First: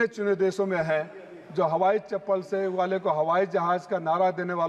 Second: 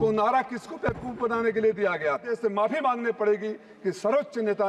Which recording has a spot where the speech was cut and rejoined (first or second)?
second